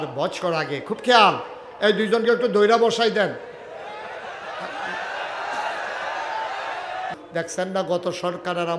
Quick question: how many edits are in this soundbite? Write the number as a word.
one